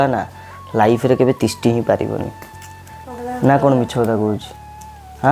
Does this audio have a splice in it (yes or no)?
no